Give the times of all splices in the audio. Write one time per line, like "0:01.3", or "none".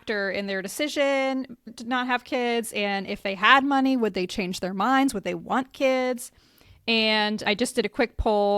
0:01.7